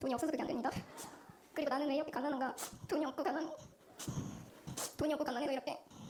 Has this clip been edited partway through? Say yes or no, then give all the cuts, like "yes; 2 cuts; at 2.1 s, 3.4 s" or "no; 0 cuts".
no; 0 cuts